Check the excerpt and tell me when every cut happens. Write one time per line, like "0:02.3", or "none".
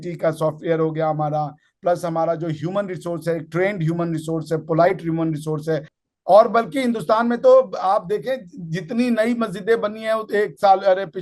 0:05.9